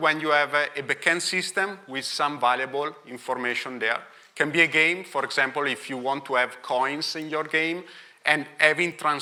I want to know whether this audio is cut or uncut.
uncut